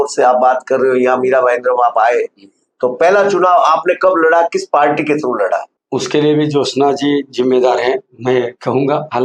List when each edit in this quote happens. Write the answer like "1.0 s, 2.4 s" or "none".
5.8 s